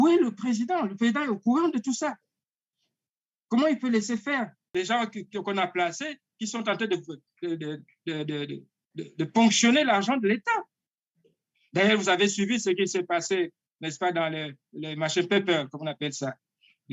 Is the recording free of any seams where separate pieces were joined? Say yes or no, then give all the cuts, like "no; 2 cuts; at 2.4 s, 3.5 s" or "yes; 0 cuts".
no; 1 cut; at 4.6 s